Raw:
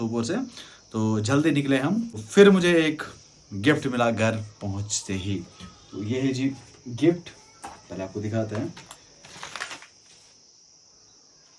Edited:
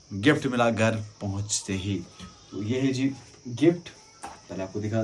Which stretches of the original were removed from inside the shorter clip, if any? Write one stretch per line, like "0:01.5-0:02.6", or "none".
none